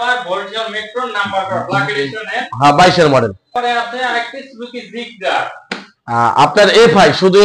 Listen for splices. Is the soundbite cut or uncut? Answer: cut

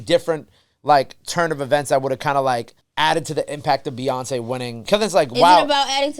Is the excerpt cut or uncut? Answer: cut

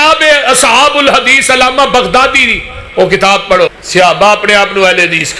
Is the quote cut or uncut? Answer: cut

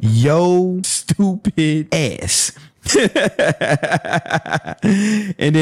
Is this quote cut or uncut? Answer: cut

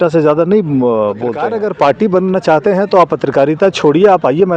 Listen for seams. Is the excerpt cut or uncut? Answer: cut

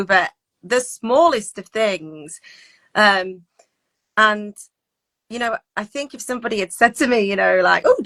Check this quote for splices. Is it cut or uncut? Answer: uncut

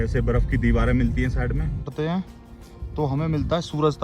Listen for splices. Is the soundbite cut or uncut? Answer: cut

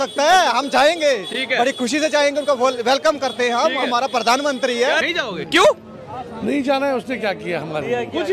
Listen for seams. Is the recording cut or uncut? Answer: uncut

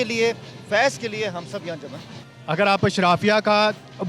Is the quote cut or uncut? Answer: cut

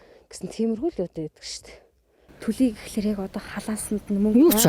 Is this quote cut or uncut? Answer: cut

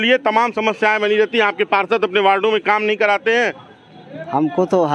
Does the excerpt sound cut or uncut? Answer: uncut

